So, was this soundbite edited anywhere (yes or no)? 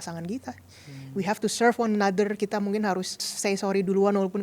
yes